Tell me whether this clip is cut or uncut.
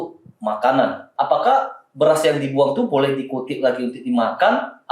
cut